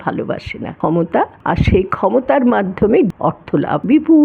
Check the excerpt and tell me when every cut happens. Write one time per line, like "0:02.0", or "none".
0:01.1
0:03.2